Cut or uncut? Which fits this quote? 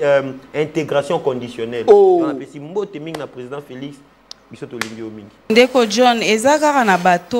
cut